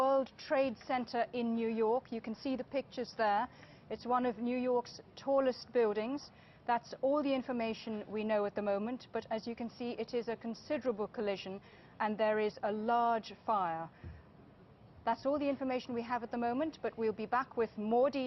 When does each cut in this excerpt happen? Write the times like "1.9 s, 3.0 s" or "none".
none